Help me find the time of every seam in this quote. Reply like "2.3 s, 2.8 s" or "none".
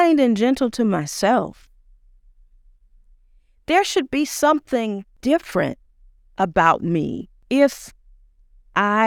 5.1 s, 7.3 s